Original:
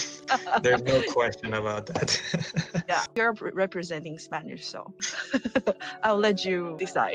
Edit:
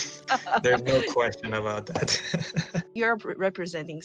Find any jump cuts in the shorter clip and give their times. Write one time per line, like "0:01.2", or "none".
0:02.9